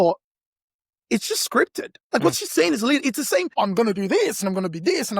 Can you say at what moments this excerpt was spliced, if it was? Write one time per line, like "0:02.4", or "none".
0:01.9
0:03.5